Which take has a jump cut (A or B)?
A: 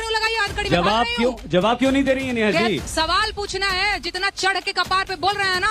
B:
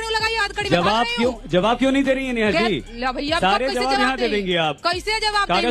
A